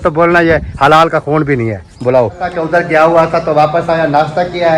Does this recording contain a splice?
yes; 1 cut; at 2.5 s

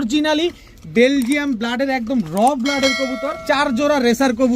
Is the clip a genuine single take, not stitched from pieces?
no; 1 cut; at 3.3 s

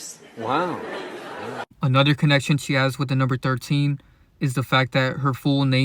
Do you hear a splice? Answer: no; 0 cuts

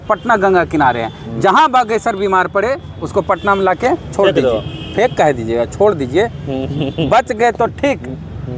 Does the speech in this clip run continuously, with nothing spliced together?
yes; 0 cuts

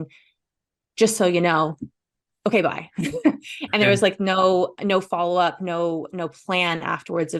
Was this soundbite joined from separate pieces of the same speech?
no; 0 cuts

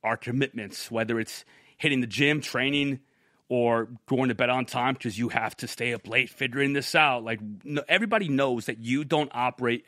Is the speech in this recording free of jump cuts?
yes; 0 cuts

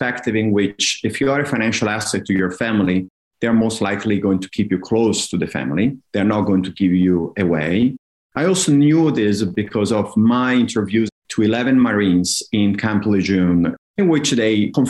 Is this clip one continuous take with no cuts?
no; 2 cuts; at 11.1 s, 13.8 s

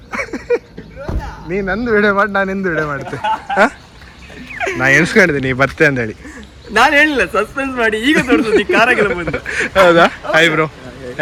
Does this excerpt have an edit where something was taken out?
no; 0 cuts

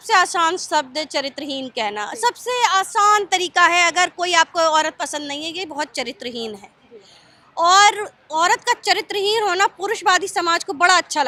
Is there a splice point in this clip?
no; 0 cuts

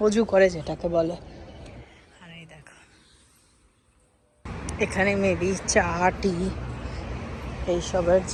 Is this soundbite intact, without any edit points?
yes; 0 cuts

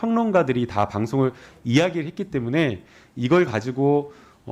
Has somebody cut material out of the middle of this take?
no; 0 cuts

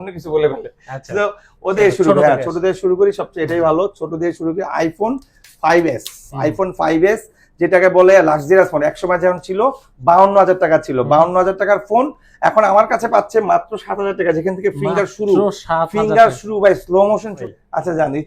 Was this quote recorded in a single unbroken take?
no; 2 cuts; at 1.8 s, 17.4 s

